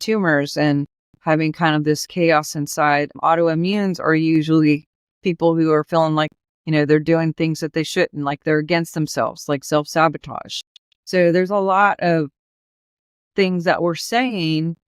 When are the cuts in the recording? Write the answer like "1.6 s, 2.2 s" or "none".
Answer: 3.2 s